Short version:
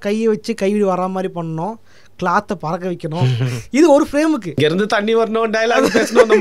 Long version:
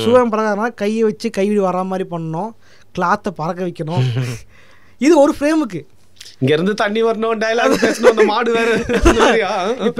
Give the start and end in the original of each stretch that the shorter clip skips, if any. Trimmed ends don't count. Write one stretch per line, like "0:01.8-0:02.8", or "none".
0:04.3-0:04.8
0:05.8-0:06.4